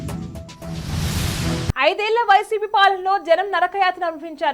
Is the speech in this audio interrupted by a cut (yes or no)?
yes